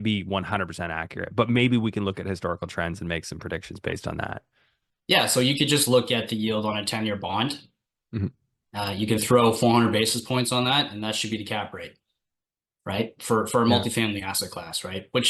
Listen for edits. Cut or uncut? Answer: uncut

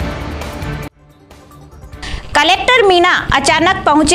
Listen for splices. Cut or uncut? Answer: cut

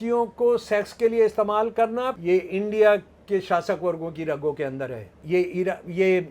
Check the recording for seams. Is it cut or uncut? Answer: cut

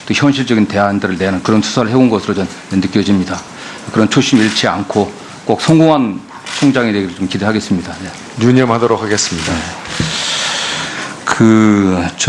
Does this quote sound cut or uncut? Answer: cut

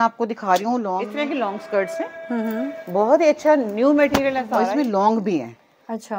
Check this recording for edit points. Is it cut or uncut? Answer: cut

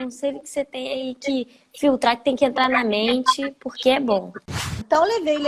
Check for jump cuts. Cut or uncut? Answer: cut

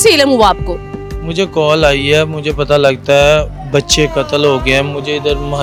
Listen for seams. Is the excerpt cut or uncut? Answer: uncut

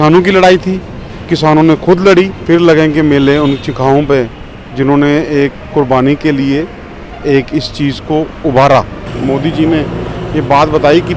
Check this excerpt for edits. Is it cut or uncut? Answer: cut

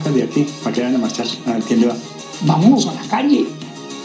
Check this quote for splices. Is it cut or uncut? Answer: cut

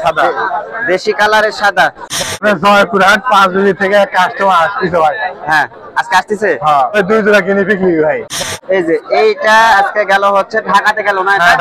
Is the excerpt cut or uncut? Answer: cut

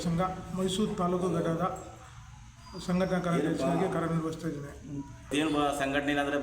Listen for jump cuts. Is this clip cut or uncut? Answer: cut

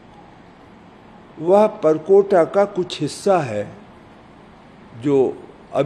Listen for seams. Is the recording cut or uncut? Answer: uncut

